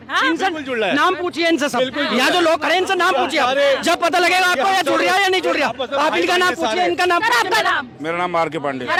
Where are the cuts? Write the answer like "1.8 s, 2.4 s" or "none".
none